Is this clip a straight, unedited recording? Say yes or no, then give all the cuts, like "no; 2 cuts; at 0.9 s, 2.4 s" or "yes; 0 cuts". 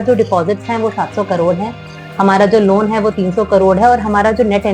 yes; 0 cuts